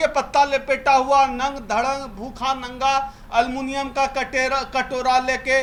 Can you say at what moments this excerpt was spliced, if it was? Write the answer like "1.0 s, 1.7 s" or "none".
none